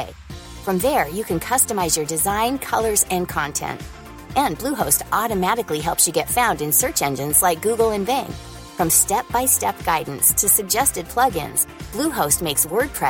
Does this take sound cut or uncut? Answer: uncut